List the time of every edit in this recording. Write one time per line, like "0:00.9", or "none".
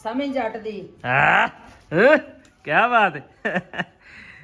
none